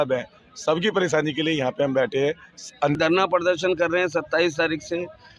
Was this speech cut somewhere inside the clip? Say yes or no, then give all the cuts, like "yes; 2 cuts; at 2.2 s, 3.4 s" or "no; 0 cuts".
yes; 1 cut; at 3.0 s